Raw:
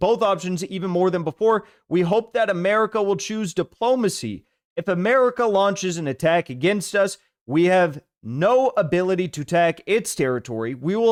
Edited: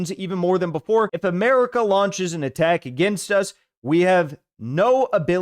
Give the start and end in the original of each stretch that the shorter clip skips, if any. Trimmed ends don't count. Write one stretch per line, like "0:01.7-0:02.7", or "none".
0:01.7-0:04.8